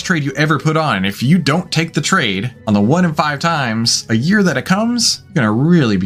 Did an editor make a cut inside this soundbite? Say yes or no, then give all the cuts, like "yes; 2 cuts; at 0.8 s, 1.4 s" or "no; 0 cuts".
yes; 2 cuts; at 2.5 s, 5.2 s